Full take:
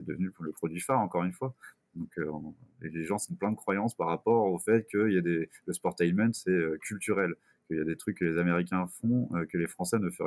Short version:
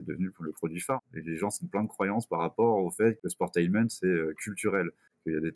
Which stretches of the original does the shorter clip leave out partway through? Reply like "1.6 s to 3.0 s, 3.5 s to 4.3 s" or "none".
1.0 s to 2.6 s, 4.9 s to 5.6 s